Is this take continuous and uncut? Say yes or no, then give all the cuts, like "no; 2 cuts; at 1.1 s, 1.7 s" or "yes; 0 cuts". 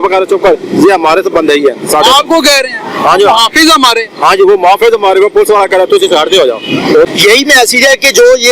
no; 1 cut; at 7.1 s